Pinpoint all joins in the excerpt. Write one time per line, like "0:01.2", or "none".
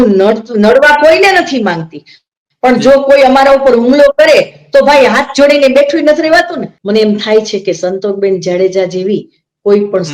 0:06.7